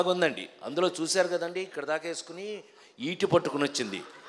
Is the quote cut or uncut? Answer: uncut